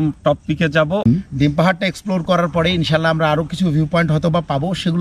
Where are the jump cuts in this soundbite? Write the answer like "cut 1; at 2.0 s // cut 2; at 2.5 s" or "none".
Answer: cut 1; at 1.1 s